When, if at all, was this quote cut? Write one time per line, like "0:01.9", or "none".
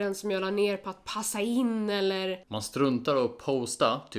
0:02.5